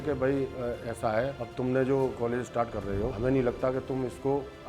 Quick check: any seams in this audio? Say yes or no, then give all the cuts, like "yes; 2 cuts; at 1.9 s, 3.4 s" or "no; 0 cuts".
yes; 1 cut; at 2.1 s